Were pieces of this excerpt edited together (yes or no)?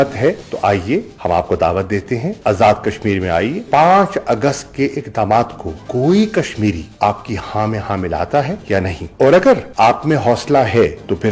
yes